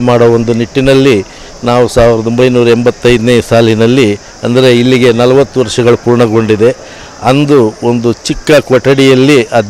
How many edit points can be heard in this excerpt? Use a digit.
0